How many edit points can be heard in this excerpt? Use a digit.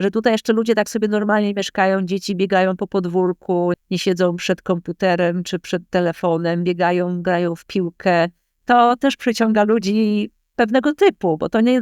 2